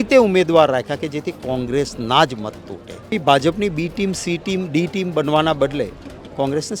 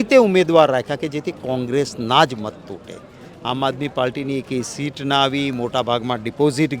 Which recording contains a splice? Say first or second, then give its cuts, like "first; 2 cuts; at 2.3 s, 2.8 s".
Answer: first; 1 cut; at 3.1 s